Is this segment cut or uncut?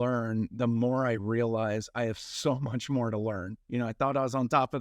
cut